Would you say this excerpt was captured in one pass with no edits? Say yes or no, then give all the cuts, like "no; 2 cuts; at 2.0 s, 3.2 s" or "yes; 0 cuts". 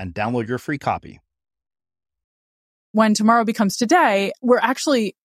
no; 2 cuts; at 2.9 s, 4.3 s